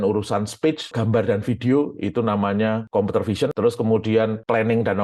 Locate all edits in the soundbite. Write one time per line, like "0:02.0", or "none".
0:00.9
0:02.8